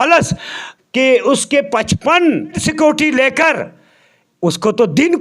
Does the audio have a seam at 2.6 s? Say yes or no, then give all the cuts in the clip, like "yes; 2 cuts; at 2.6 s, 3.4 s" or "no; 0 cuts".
yes; 1 cut; at 2.6 s